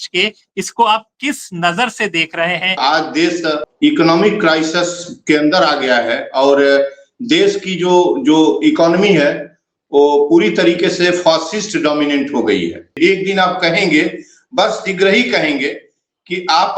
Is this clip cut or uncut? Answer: cut